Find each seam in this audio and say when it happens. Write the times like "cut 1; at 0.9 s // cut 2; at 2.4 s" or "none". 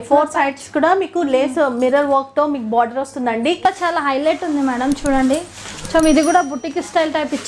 cut 1; at 3.6 s